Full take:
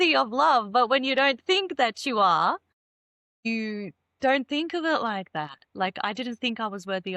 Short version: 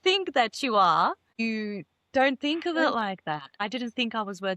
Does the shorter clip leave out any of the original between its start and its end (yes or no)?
yes